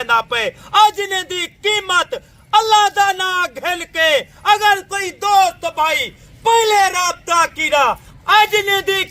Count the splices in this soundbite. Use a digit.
1